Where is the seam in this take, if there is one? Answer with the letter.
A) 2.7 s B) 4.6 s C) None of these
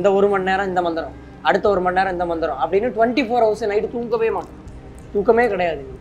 C